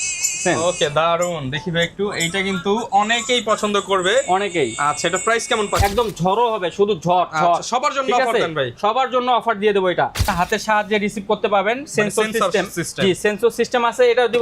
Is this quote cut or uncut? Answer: cut